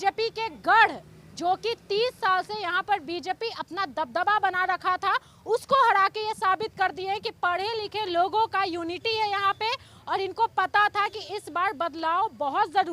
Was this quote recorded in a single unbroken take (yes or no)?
yes